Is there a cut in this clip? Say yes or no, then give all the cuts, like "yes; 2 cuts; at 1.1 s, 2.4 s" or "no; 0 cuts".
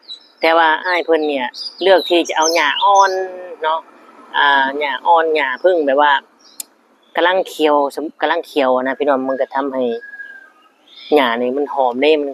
no; 0 cuts